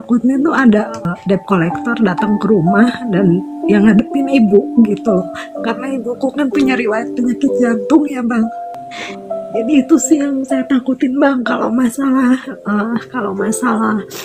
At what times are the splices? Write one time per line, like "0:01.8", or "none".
0:01.0
0:08.7